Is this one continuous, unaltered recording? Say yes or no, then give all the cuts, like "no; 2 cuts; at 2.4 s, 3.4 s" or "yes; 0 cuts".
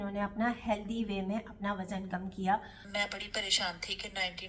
no; 1 cut; at 2.8 s